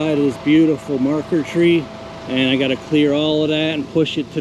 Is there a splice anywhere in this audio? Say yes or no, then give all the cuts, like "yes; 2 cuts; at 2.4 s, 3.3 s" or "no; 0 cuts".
no; 0 cuts